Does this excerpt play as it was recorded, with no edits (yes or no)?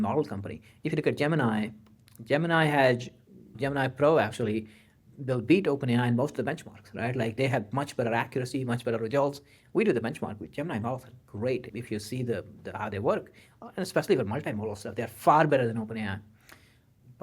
yes